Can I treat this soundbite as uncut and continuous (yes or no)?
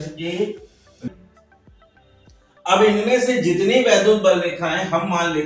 no